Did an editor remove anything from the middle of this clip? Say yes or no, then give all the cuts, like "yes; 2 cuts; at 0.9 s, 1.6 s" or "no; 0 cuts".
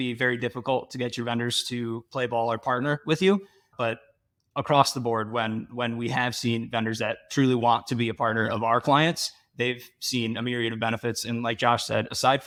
no; 0 cuts